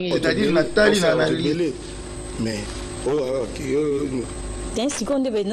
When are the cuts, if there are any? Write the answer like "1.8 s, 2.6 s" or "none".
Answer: 1.6 s